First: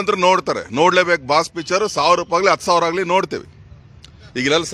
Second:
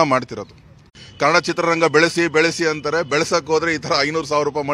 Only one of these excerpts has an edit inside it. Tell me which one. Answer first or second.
second